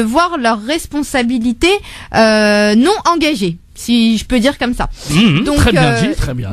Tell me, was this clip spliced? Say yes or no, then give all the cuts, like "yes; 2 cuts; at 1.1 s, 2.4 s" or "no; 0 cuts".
no; 0 cuts